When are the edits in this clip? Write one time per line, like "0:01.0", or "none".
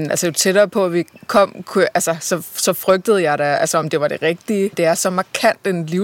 0:04.8